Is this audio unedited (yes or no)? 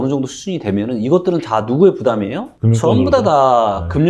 yes